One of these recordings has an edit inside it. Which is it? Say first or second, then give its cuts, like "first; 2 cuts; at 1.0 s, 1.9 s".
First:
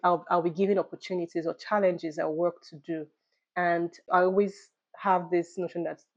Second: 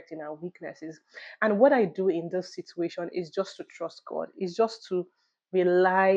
first; 1 cut; at 4.0 s